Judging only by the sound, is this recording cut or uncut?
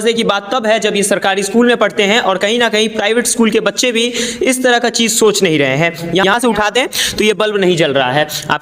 cut